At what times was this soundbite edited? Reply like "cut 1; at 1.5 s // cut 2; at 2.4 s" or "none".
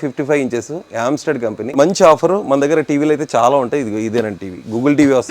cut 1; at 1.8 s